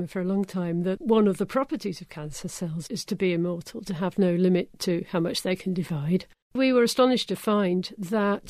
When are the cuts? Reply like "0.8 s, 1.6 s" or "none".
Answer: 1.0 s, 2.8 s, 6.4 s